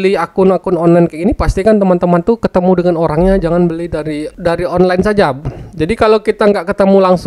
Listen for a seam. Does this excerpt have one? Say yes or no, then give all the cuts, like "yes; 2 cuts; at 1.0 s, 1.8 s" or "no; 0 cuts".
no; 0 cuts